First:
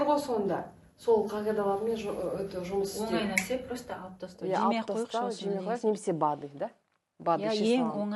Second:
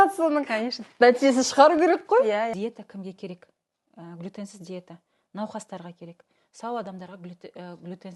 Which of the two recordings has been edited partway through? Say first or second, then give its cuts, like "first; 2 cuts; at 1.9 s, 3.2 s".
second; 1 cut; at 2.5 s